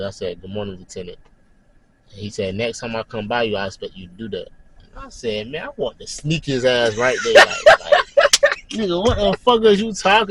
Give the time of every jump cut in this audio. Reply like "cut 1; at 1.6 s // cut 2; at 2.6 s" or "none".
none